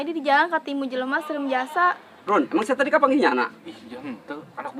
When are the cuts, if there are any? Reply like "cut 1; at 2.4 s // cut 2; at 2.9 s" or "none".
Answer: cut 1; at 2.1 s